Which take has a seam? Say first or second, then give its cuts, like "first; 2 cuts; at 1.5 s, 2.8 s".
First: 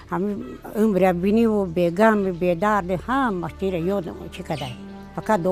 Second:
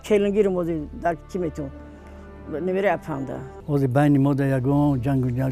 second; 1 cut; at 3.5 s